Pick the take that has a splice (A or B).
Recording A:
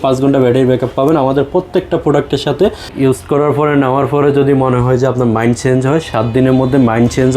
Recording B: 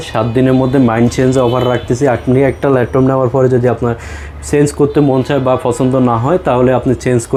A